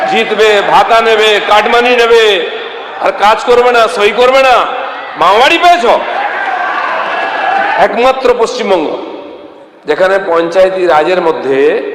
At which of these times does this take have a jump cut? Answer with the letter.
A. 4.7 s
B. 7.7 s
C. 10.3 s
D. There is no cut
B